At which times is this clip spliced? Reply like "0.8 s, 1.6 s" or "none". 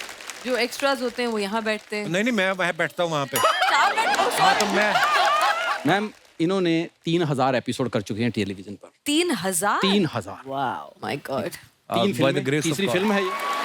5.7 s